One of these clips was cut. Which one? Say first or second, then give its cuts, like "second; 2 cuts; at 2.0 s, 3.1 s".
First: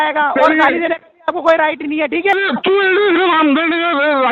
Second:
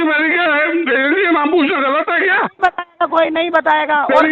first; 1 cut; at 2.4 s